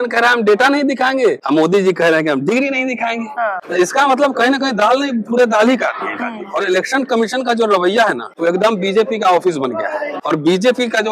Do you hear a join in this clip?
yes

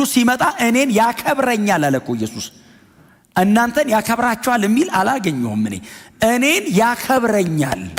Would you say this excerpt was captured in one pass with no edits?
yes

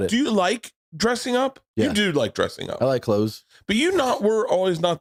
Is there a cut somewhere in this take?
no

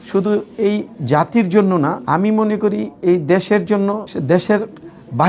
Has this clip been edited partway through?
yes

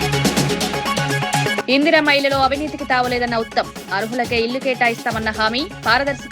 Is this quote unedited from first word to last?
no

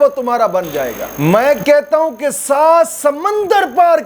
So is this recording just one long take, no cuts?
no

